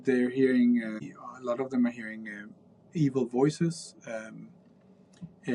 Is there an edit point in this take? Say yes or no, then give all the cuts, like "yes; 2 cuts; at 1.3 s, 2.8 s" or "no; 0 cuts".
yes; 1 cut; at 1.0 s